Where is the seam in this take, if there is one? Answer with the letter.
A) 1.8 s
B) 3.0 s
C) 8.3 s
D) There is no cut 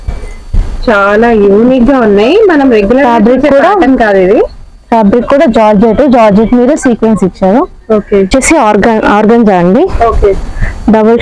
C